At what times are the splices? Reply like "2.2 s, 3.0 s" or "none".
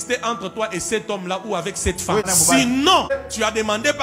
2.3 s, 3.1 s